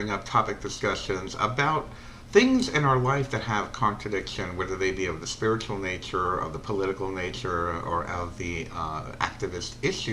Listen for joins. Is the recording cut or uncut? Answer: cut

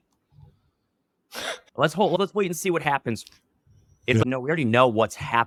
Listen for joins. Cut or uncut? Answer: uncut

